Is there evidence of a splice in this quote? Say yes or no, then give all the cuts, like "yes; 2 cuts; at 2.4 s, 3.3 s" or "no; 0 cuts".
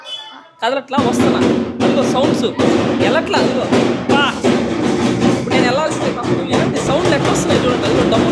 no; 0 cuts